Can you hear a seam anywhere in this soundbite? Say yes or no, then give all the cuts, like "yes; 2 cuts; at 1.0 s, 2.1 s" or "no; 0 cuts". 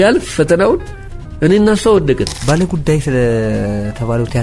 yes; 1 cut; at 2.3 s